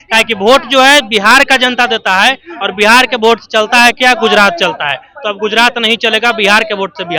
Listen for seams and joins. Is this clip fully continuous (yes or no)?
yes